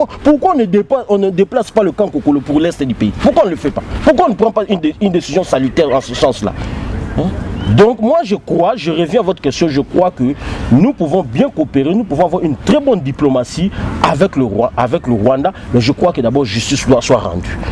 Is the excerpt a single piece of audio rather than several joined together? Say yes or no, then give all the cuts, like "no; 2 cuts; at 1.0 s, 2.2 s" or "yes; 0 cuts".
yes; 0 cuts